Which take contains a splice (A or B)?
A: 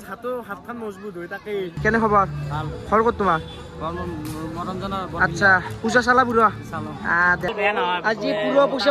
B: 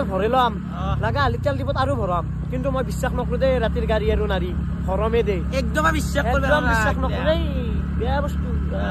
A